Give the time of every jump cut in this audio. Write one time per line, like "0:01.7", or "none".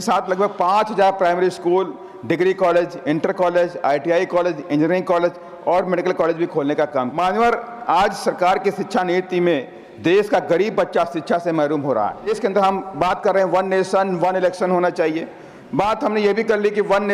0:07.2
0:12.3

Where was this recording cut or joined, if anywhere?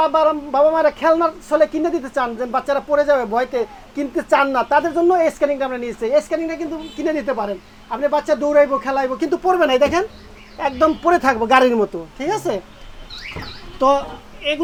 none

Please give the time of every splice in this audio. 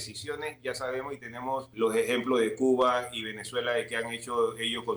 0:01.7

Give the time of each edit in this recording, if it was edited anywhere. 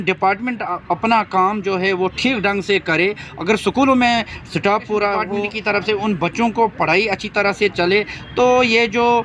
0:05.5

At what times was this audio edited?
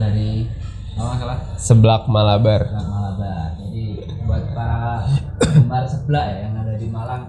none

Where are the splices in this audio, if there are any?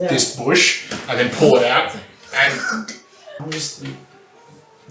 0:03.4

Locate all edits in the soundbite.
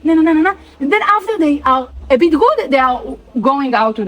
0:01.9

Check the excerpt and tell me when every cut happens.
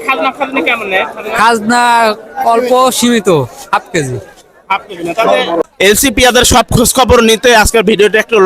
0:05.6

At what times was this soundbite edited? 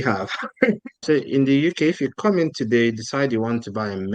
0:00.9

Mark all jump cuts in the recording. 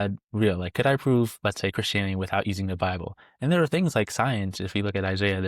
none

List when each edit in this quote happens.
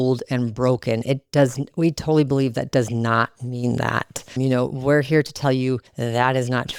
none

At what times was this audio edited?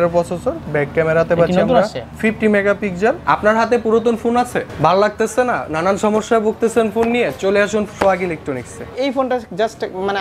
0:02.0
0:03.2
0:04.6
0:08.9

